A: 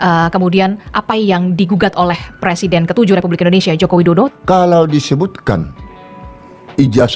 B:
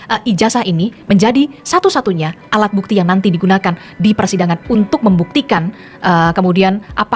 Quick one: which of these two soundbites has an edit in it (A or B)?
A